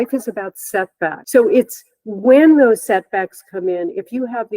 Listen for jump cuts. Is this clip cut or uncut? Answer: cut